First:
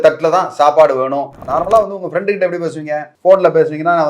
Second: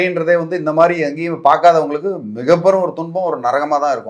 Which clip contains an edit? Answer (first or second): first